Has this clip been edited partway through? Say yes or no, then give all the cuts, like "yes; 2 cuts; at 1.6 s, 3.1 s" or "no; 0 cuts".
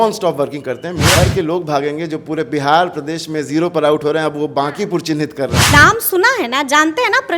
yes; 2 cuts; at 1.2 s, 5.7 s